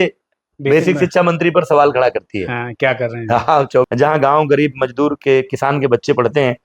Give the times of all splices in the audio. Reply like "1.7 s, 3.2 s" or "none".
3.9 s